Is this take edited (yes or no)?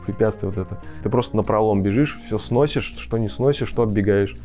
yes